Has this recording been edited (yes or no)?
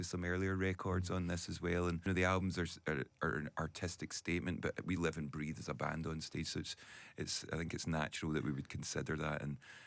yes